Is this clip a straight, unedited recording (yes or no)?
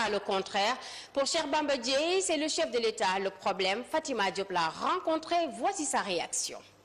no